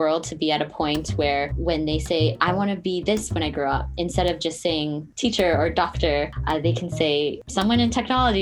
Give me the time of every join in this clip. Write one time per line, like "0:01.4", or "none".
0:01.5
0:05.1
0:06.4
0:07.4

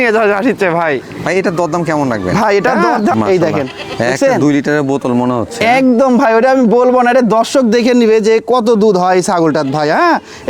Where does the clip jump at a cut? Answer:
0:03.1

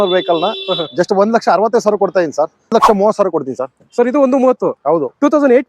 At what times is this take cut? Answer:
0:02.7

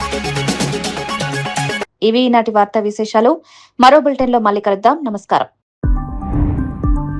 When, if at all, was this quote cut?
none

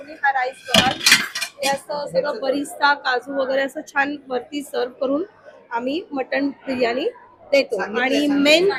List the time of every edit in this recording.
none

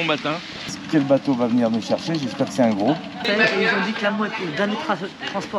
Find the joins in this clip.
0:00.8
0:03.2

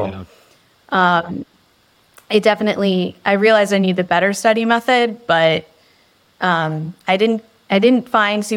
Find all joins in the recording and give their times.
none

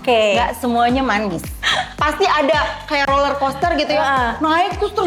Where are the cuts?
none

